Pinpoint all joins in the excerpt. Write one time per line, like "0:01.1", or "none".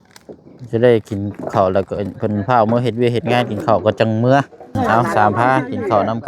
0:04.6